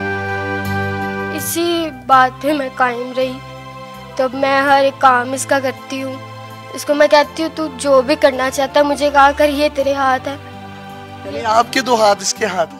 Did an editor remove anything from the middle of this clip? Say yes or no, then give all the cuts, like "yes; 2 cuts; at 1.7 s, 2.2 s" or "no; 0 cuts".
no; 0 cuts